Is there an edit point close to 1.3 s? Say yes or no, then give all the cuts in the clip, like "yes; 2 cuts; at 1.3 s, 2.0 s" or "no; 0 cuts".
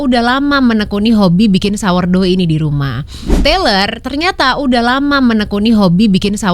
no; 1 cut; at 3.4 s